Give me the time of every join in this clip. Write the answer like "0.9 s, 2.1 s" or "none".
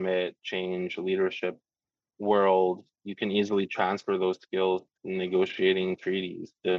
4.9 s